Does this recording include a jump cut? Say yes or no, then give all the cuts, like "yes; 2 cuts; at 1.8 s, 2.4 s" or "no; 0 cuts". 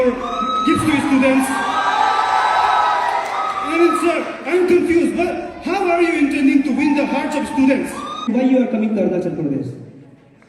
yes; 1 cut; at 8.2 s